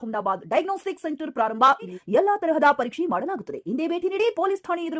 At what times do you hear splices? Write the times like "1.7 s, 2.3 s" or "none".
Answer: 2.0 s